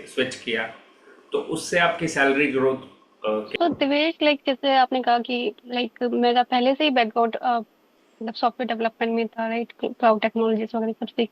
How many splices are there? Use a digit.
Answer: 1